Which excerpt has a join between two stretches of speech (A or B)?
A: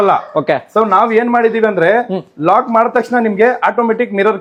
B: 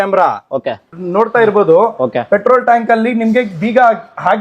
B